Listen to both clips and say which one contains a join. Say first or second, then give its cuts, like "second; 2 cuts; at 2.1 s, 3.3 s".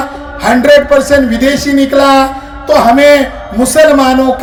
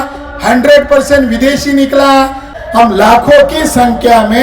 second; 1 cut; at 2.5 s